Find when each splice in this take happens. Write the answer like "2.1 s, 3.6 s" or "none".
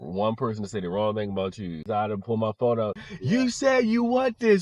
1.9 s, 3.1 s